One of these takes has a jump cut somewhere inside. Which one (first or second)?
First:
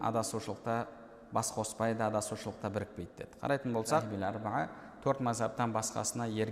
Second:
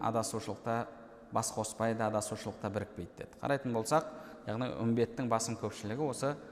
first